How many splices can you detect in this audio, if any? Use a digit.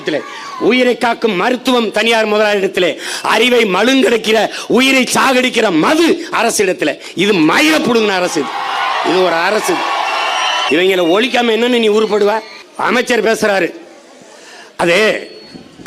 2